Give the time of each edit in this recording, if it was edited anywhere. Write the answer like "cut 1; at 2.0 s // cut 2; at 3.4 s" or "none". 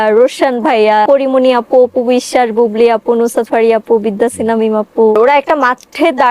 cut 1; at 1.1 s // cut 2; at 5.2 s